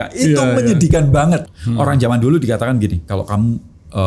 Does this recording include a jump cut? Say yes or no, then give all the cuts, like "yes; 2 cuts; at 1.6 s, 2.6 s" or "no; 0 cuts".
yes; 1 cut; at 1.4 s